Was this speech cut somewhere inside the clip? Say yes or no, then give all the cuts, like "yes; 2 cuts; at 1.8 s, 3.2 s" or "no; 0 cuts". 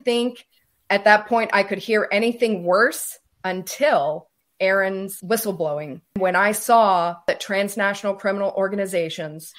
yes; 4 cuts; at 4.3 s, 5.2 s, 6.2 s, 7.3 s